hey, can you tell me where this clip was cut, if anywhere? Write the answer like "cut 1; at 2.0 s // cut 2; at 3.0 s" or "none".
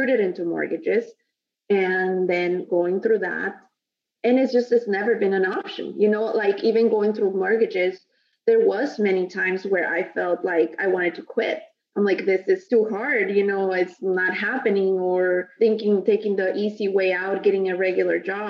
cut 1; at 4.5 s // cut 2; at 12.6 s // cut 3; at 15.5 s